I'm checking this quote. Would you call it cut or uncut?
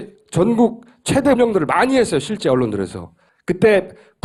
uncut